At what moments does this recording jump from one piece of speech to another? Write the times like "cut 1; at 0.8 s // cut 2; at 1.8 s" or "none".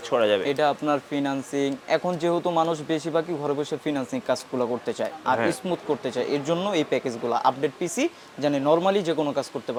none